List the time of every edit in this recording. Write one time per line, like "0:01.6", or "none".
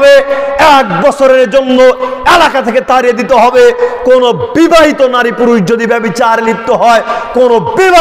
none